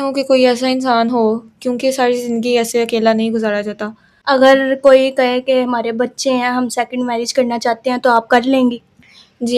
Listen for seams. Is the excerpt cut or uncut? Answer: cut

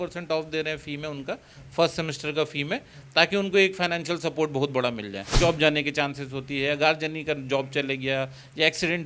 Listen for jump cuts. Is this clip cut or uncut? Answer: cut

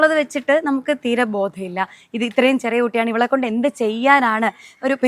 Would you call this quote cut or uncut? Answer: uncut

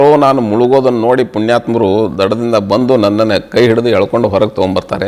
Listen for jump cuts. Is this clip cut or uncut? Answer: uncut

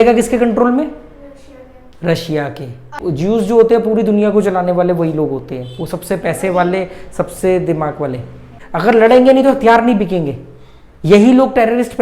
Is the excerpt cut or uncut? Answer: cut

